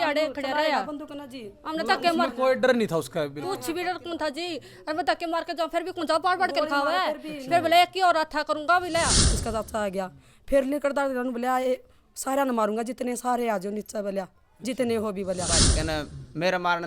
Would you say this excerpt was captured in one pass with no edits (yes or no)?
no